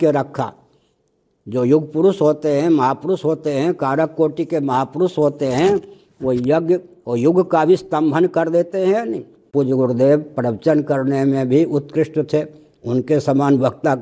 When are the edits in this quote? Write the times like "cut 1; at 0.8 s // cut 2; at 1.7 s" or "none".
cut 1; at 9.5 s